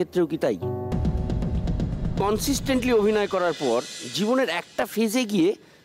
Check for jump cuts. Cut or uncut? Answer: cut